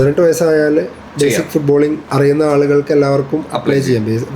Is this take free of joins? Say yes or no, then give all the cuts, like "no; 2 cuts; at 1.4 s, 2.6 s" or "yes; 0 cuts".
no; 2 cuts; at 1.0 s, 2.0 s